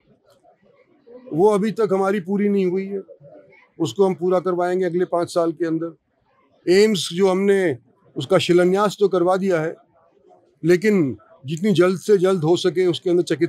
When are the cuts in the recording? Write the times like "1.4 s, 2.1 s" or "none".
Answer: none